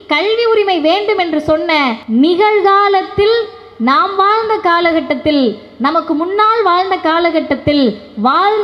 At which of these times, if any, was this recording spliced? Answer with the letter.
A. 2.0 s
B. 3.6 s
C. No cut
A